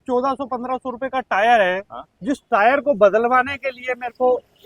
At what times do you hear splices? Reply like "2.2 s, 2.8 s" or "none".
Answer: none